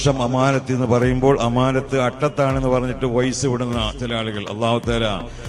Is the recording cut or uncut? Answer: uncut